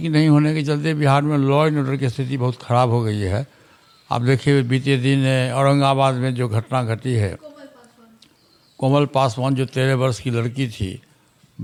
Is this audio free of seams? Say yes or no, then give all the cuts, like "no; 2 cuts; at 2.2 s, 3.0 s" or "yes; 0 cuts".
yes; 0 cuts